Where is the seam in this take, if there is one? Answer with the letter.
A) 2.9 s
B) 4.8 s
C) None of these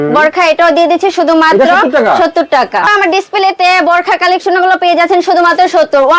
A